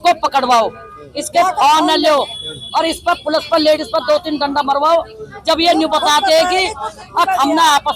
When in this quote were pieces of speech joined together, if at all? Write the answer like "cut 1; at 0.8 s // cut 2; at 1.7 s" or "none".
none